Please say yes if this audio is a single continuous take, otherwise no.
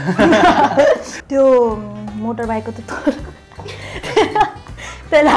no